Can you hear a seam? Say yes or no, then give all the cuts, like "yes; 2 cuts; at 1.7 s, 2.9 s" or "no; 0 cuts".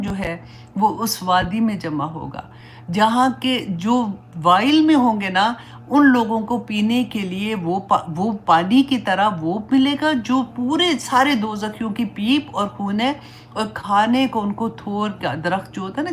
no; 0 cuts